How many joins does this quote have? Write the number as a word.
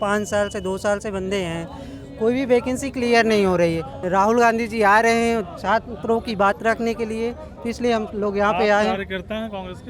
one